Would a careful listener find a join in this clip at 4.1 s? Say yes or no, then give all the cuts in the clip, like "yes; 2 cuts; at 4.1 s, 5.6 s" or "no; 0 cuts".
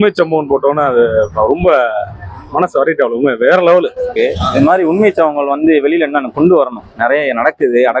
yes; 1 cut; at 4.1 s